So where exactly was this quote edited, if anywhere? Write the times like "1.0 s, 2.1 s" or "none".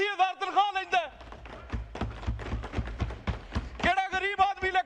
none